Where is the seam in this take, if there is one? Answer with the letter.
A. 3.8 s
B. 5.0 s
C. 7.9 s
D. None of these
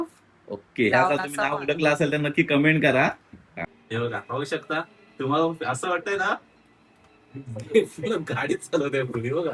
A